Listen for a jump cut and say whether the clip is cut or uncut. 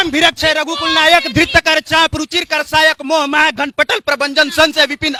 uncut